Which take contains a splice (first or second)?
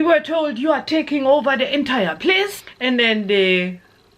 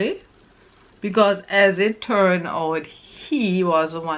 first